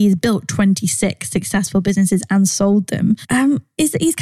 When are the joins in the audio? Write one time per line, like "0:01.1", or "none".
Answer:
0:03.2

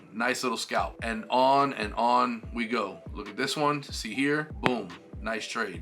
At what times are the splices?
0:01.0
0:04.5

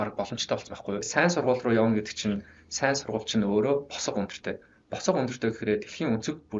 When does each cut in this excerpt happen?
0:01.1

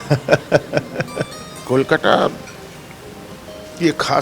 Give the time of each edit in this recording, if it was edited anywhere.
0:01.5

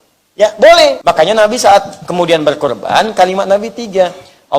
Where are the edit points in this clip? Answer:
0:01.0

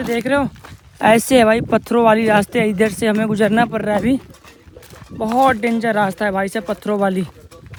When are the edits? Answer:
none

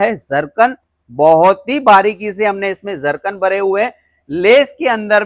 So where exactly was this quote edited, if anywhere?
none

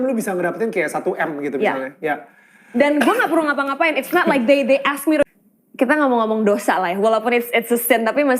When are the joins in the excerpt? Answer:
0:05.2

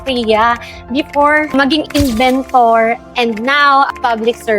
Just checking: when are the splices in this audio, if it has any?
0:01.5

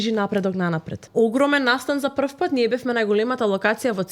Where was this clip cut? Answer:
0:01.0

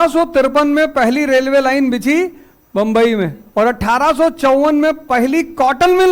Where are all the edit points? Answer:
0:03.4

